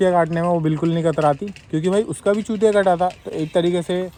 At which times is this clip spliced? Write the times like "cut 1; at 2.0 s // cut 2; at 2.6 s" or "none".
none